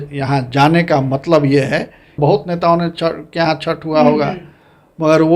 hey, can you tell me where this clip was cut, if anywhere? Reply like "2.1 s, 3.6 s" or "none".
2.1 s